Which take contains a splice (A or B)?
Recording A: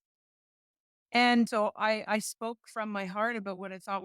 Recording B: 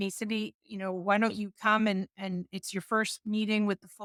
A